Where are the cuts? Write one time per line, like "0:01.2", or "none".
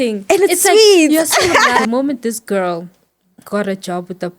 0:01.8